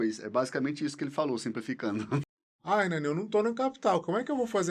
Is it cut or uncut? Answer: cut